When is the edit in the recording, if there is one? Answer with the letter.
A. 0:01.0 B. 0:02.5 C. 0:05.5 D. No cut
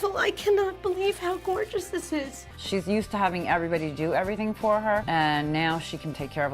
B